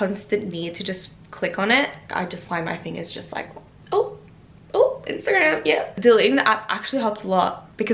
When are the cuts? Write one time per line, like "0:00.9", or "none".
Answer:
none